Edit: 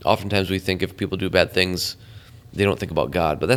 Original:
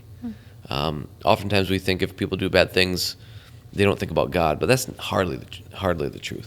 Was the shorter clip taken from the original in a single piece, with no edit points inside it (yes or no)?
yes